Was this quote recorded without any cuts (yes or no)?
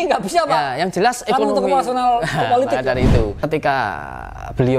no